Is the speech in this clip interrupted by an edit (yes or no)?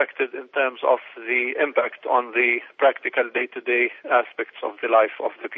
no